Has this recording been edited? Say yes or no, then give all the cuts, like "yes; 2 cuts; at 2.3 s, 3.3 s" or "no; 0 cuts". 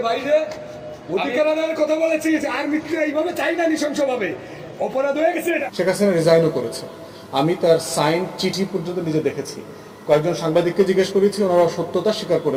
yes; 1 cut; at 5.7 s